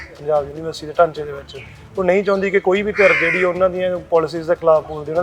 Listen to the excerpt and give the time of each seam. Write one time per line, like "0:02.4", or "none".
none